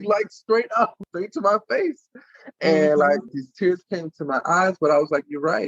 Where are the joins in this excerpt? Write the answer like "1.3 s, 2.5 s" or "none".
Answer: 1.0 s, 3.3 s